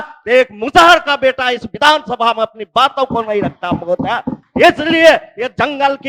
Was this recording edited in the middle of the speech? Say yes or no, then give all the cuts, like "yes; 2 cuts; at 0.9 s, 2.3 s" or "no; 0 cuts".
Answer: no; 0 cuts